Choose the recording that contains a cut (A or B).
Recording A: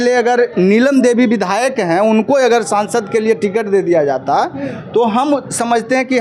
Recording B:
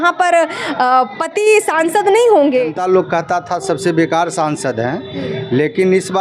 B